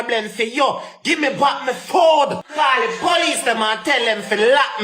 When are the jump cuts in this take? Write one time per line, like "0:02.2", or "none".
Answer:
0:02.4